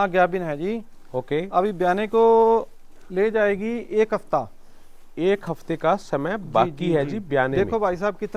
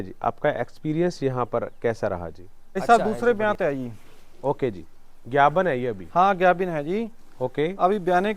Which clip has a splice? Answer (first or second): second